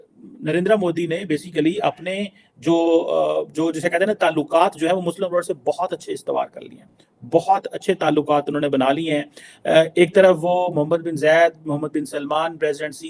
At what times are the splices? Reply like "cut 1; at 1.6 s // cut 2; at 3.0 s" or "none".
none